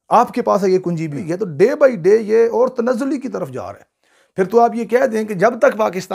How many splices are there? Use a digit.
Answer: 1